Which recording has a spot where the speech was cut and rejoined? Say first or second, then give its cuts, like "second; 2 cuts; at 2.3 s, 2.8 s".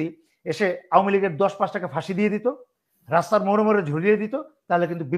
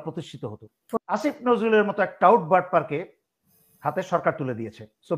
second; 1 cut; at 1.0 s